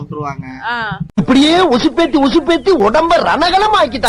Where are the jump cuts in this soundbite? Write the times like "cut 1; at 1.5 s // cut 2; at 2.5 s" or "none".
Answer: none

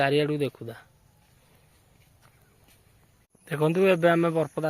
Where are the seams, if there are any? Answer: cut 1; at 3.3 s

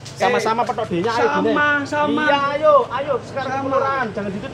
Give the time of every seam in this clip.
none

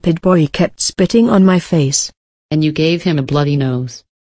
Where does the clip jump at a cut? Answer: none

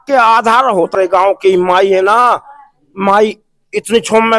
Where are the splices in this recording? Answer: cut 1; at 0.9 s

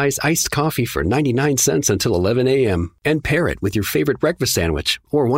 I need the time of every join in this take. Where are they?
none

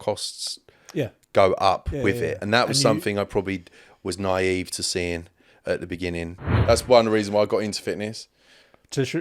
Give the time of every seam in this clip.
cut 1; at 6.5 s

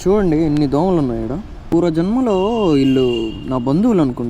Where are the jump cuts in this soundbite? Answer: cut 1; at 1.5 s

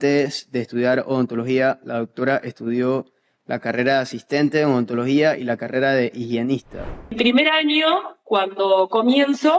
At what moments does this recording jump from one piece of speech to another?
cut 1; at 7.1 s

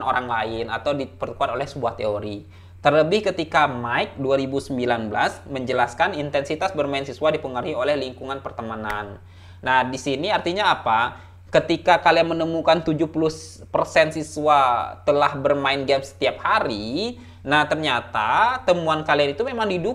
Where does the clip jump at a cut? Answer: none

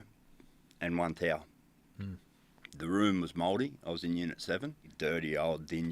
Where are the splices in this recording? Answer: cut 1; at 4.9 s

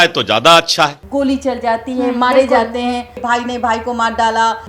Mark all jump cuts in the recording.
cut 1; at 1.0 s // cut 2; at 3.2 s

